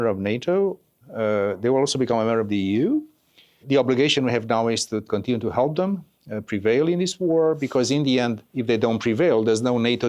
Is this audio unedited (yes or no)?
no